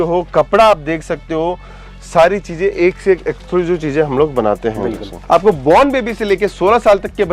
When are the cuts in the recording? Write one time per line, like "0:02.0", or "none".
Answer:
0:05.1